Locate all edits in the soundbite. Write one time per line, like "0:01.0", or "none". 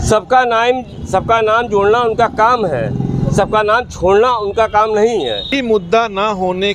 0:05.5